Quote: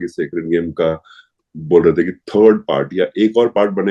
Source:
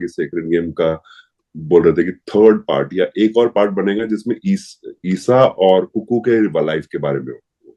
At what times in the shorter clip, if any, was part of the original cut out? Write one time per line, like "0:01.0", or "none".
none